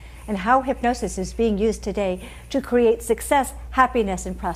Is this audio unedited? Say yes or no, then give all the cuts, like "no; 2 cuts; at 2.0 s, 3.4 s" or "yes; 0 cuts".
yes; 0 cuts